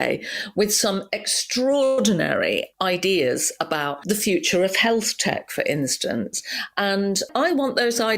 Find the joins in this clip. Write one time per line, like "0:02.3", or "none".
0:02.7